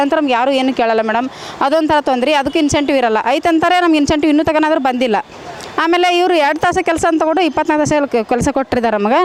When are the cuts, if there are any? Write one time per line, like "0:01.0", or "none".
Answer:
none